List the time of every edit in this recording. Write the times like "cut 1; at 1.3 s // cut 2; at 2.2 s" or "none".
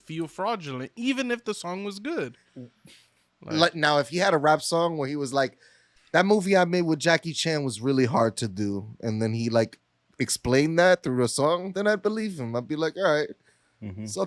none